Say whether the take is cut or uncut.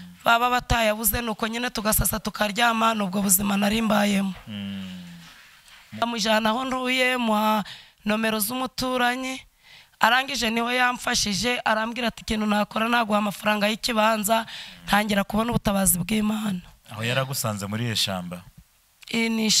cut